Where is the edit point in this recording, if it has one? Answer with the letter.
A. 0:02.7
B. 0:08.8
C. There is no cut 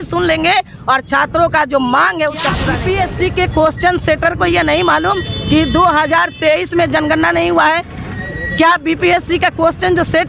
A